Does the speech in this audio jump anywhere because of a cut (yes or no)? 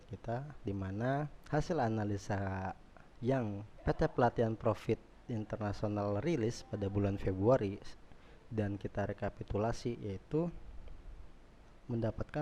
yes